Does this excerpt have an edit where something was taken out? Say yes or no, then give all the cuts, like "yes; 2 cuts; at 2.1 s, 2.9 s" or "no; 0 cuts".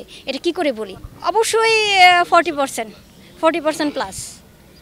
no; 0 cuts